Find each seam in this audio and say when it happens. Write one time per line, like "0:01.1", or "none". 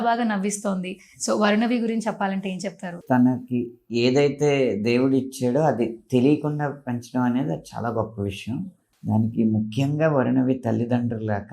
0:03.0
0:08.9